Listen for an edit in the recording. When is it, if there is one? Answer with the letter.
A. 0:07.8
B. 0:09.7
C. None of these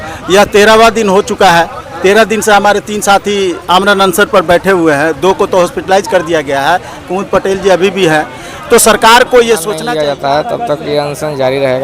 B